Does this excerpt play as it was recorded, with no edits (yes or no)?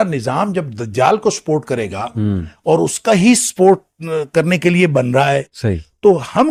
yes